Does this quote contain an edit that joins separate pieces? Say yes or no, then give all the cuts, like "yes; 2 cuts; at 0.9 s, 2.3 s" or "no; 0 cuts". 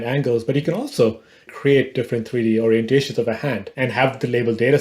yes; 2 cuts; at 1.5 s, 3.7 s